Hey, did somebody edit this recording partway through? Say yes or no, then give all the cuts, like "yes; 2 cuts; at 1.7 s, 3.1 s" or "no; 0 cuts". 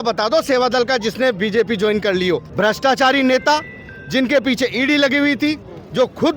yes; 1 cut; at 2.5 s